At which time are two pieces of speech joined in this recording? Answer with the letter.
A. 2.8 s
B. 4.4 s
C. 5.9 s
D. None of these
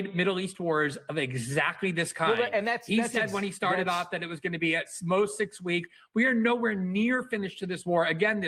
D